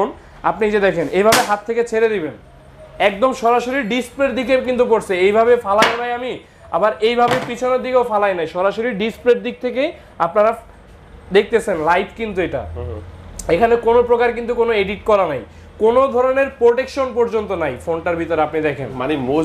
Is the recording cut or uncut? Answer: uncut